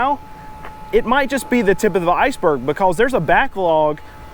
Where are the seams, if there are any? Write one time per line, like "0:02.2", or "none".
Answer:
none